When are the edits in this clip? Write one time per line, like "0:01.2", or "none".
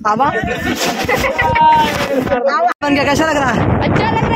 0:02.8